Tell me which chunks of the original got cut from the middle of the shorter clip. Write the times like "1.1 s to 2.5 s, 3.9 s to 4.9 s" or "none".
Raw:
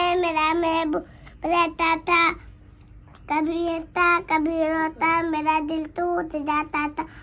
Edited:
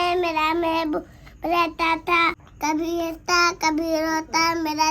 2.5 s to 3.1 s